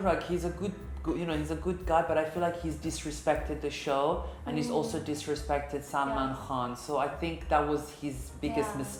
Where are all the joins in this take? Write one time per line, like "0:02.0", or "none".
none